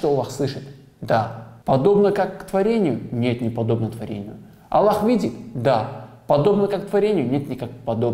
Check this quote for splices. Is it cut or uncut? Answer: cut